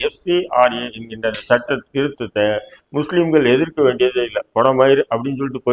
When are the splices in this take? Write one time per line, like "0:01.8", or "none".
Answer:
none